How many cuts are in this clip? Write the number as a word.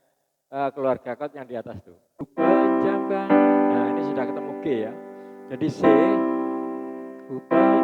one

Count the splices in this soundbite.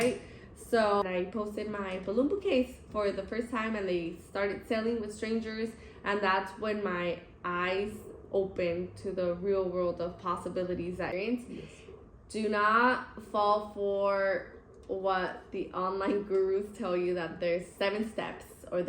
two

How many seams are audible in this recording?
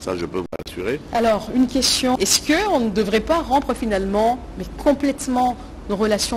one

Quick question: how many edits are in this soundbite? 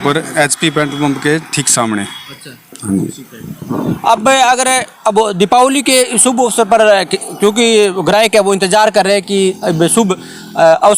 zero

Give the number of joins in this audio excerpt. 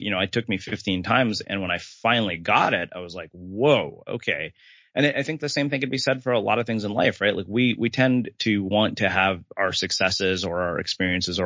zero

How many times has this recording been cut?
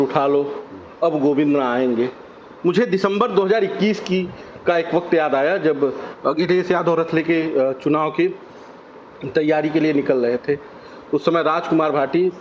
zero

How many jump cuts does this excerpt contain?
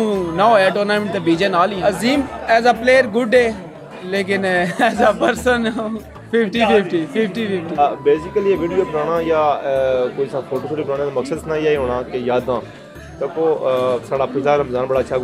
two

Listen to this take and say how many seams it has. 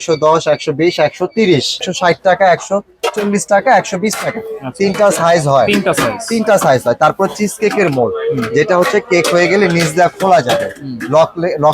one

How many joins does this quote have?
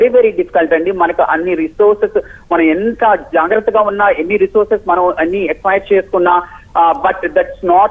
zero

